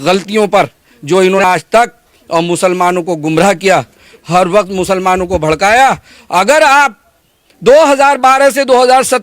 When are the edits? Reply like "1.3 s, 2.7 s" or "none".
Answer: 1.4 s